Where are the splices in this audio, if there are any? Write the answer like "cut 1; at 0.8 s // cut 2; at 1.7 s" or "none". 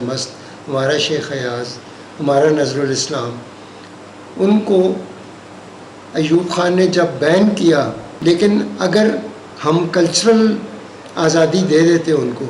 cut 1; at 8.0 s